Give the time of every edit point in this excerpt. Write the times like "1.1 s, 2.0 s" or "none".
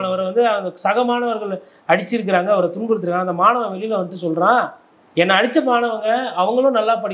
none